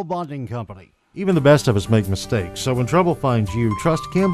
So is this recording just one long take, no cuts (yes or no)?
no